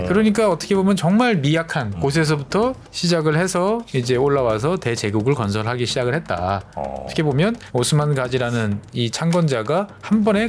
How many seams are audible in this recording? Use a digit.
1